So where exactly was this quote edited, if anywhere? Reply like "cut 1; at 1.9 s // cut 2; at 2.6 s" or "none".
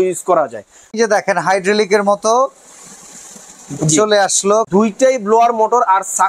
cut 1; at 0.9 s // cut 2; at 4.7 s